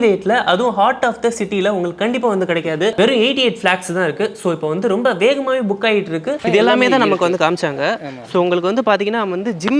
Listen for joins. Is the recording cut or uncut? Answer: cut